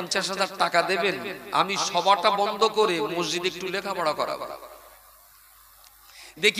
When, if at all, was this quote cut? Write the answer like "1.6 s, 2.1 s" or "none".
none